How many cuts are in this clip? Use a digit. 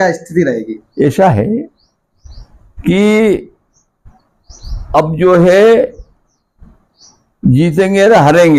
0